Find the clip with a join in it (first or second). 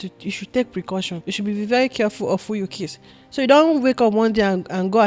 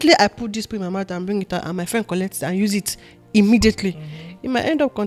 first